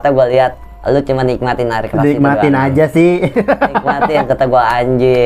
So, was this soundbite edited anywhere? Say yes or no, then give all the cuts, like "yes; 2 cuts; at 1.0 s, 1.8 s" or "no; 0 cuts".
no; 0 cuts